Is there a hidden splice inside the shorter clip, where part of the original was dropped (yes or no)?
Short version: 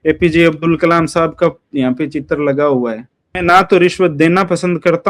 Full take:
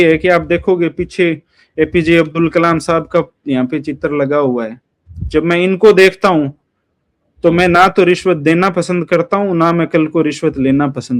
yes